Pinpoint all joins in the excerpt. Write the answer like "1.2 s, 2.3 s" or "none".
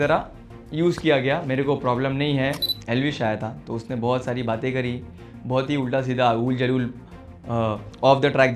2.7 s